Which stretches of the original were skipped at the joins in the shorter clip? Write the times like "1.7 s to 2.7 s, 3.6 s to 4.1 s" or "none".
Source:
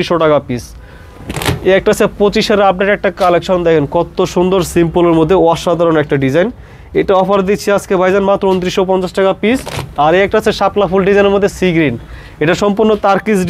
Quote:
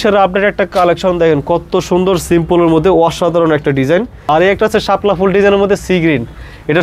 6.6 s to 9.9 s